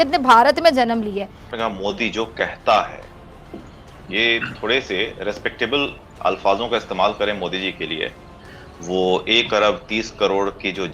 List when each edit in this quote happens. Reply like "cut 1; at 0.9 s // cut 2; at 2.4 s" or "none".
cut 1; at 1.5 s